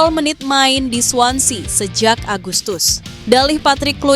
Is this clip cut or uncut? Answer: cut